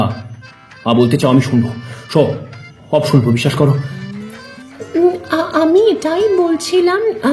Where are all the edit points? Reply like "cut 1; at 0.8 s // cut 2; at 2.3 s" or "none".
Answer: none